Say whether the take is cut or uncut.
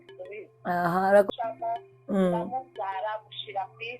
cut